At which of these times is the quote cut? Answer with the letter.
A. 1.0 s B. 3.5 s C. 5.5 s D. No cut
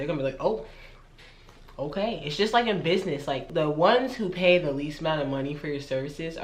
B